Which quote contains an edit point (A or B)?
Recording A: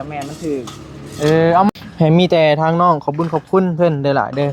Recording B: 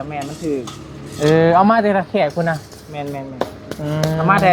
A